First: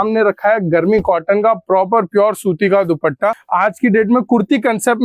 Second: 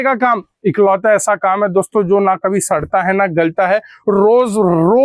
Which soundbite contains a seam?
first; 1 cut; at 3.4 s

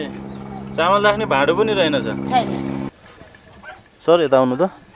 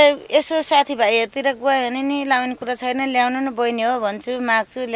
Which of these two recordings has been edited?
first; 1 cut; at 2.9 s

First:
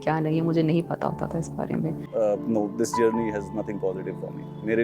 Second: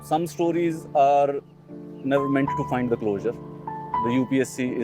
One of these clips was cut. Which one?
first; 1 cut; at 2.0 s

